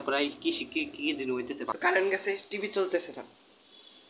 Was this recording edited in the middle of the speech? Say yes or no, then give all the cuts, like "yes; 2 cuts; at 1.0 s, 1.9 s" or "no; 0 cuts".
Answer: yes; 1 cut; at 1.7 s